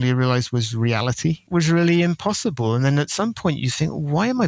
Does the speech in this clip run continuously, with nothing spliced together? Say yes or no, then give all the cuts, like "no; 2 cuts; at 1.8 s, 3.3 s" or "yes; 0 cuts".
no; 1 cut; at 1.4 s